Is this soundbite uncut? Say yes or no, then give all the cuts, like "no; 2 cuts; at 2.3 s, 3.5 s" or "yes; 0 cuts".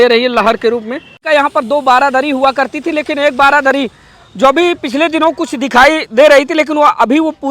no; 1 cut; at 1.2 s